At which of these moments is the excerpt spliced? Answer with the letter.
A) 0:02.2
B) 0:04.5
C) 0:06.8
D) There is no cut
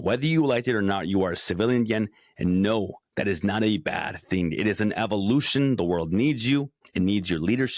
C